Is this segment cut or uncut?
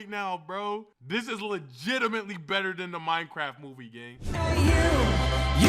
cut